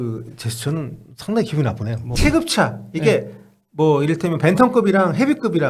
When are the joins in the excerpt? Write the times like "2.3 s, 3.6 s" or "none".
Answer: 2.0 s